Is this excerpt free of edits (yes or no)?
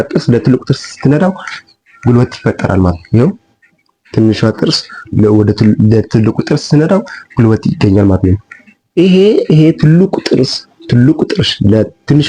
yes